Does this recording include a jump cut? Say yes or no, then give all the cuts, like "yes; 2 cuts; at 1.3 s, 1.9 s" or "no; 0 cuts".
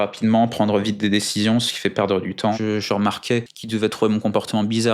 yes; 2 cuts; at 2.5 s, 3.6 s